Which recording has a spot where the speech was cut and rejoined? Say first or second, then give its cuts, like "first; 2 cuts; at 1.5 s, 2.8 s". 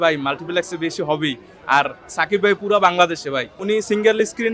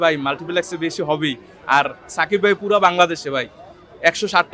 first; 1 cut; at 3.5 s